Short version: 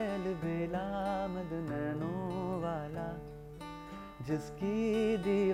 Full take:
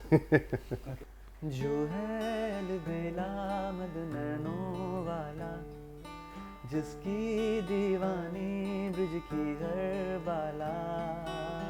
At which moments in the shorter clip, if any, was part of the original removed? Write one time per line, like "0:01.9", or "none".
none